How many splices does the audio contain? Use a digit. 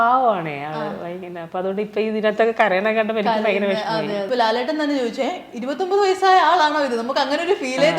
1